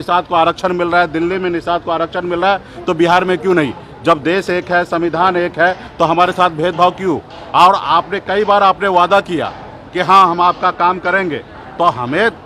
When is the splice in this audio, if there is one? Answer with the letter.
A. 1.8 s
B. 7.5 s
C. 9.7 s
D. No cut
D